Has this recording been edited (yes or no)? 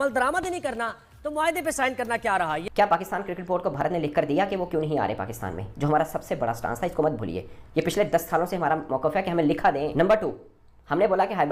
yes